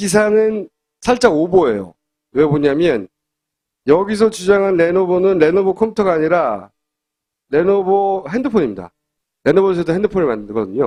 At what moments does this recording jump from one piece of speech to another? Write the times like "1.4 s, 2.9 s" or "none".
none